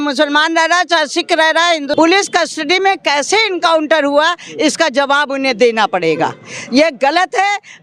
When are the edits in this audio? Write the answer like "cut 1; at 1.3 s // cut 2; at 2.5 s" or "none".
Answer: cut 1; at 1.9 s